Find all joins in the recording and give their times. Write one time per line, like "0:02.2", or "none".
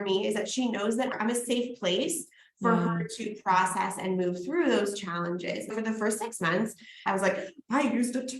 0:05.7
0:07.0